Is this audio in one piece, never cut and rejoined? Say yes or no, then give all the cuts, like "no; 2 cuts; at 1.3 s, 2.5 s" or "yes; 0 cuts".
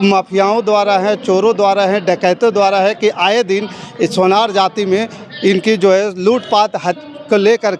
yes; 0 cuts